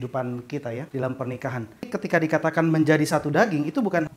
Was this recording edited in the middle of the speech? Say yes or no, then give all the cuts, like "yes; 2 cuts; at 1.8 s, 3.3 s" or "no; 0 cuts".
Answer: no; 0 cuts